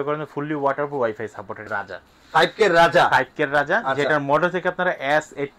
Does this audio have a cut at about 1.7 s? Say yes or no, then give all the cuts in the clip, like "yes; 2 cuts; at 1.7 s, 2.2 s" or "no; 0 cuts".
yes; 1 cut; at 1.7 s